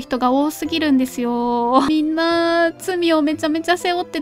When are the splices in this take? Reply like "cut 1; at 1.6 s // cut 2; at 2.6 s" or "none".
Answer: cut 1; at 1.9 s